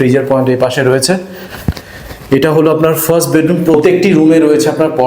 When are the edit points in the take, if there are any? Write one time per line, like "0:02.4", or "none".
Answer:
0:03.7